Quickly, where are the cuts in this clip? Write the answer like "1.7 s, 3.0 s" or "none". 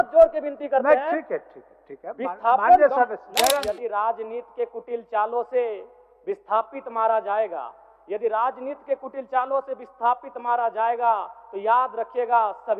3.6 s